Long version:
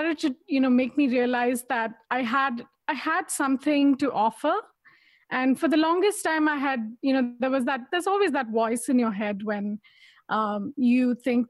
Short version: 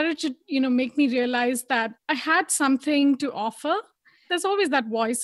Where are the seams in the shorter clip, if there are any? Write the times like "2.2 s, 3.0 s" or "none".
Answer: 2.0 s, 4.2 s